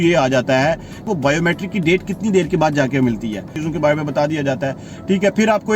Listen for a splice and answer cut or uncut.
cut